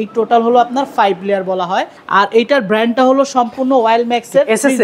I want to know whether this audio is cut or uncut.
cut